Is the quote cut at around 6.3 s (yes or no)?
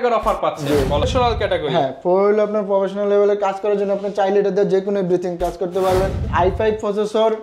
yes